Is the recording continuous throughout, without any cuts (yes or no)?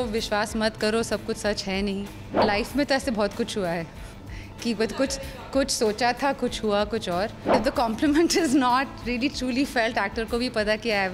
no